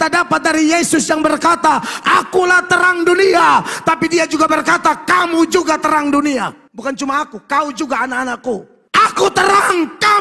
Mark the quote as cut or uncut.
cut